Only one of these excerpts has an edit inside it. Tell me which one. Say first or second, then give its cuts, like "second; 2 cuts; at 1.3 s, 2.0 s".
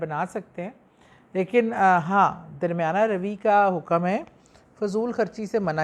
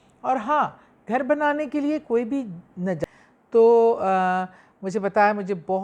second; 1 cut; at 3.0 s